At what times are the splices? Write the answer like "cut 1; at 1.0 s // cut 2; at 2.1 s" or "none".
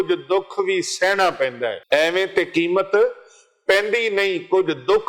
cut 1; at 1.8 s